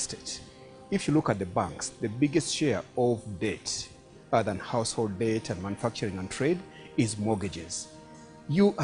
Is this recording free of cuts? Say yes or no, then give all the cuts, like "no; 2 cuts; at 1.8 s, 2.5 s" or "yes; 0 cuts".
yes; 0 cuts